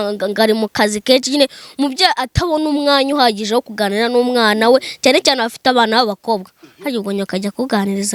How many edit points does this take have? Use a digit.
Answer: 0